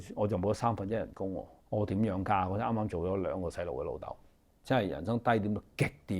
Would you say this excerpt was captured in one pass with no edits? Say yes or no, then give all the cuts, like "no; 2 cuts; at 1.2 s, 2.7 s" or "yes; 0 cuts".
no; 2 cuts; at 1.5 s, 4.5 s